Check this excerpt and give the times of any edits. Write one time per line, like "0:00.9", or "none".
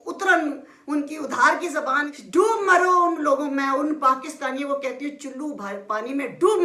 0:02.1